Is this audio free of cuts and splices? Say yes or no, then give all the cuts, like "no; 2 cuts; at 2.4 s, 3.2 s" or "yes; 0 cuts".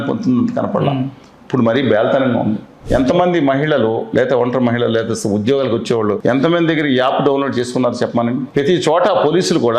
no; 3 cuts; at 2.7 s, 6.2 s, 8.5 s